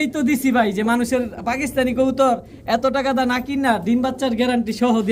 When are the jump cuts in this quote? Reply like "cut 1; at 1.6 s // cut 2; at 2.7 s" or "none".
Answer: none